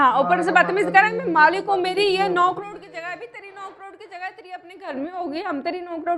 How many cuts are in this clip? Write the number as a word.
zero